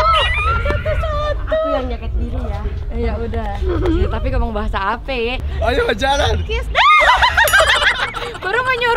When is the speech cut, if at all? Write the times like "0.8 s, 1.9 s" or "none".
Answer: 5.4 s

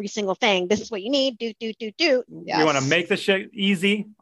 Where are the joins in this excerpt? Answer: 2.4 s

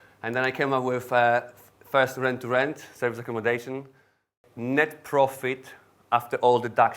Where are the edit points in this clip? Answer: 4.4 s

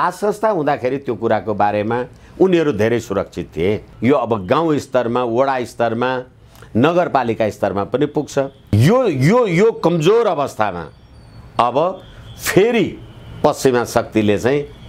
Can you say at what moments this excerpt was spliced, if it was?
3.9 s, 8.6 s

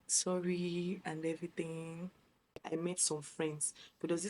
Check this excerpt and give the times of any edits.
2.6 s

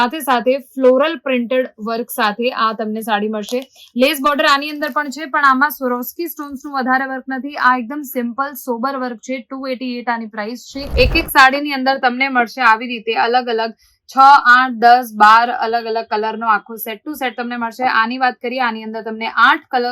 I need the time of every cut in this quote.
10.8 s

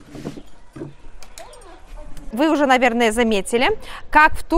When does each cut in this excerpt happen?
2.2 s

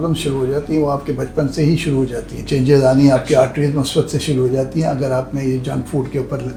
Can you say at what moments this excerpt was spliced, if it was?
none

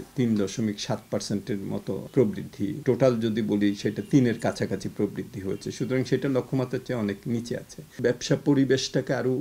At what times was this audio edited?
2.1 s, 2.8 s, 7.9 s

